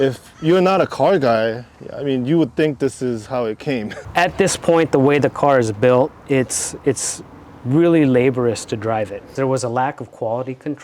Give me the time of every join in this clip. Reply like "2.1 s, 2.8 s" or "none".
4.0 s, 9.3 s